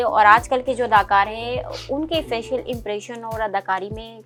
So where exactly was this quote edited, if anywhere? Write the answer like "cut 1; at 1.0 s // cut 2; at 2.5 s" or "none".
none